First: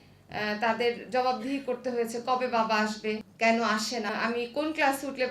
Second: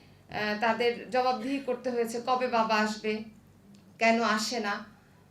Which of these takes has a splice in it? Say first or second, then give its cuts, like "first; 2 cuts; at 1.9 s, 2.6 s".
first; 2 cuts; at 3.3 s, 4.1 s